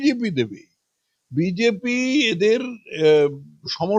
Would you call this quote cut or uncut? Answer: uncut